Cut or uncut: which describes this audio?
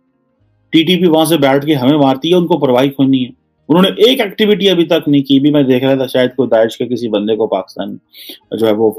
uncut